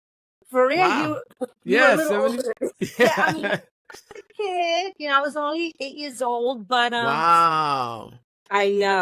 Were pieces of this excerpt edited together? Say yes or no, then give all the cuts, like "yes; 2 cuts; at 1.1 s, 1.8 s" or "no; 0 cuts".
yes; 1 cut; at 2.8 s